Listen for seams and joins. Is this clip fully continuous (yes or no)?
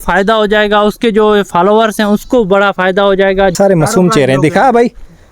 no